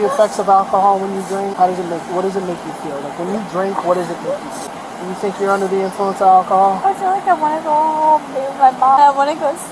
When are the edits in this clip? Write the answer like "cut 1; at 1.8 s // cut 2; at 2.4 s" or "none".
cut 1; at 1.5 s // cut 2; at 4.7 s // cut 3; at 9.0 s